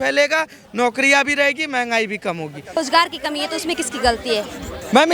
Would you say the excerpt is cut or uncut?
cut